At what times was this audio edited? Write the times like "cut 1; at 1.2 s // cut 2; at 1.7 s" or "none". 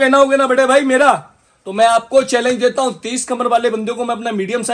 none